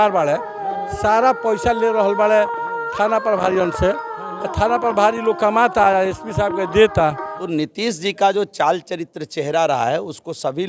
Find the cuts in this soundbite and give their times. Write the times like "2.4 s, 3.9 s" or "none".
7.3 s